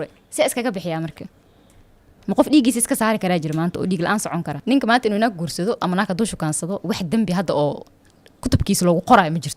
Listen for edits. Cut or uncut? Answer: cut